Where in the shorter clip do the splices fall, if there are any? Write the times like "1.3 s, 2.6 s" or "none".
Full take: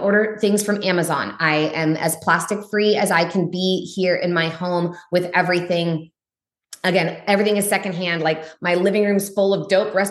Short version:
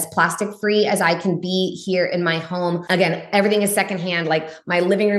2.8 s